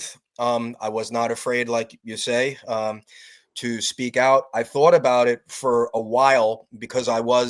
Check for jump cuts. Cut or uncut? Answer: uncut